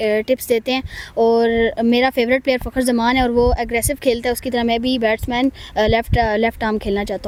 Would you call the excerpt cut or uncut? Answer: uncut